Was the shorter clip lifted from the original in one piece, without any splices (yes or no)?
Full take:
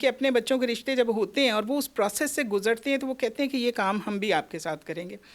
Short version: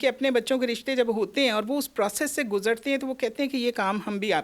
yes